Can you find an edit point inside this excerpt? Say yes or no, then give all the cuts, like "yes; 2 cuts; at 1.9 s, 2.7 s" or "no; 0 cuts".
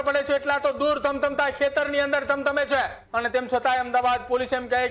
yes; 1 cut; at 3.0 s